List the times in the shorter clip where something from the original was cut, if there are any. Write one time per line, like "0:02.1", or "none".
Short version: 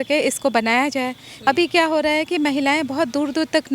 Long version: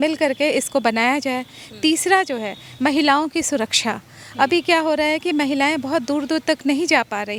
0:01.3